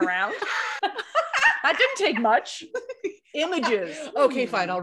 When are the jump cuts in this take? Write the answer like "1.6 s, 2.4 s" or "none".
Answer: none